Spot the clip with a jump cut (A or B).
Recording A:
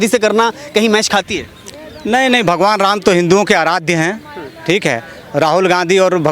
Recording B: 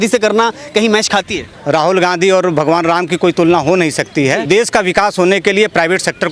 B